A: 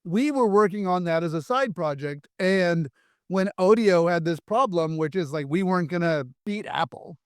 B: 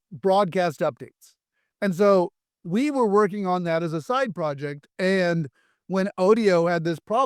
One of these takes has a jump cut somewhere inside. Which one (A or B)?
A